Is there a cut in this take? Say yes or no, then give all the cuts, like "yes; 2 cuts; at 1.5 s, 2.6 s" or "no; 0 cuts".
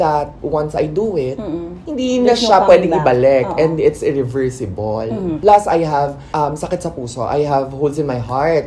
yes; 1 cut; at 5.4 s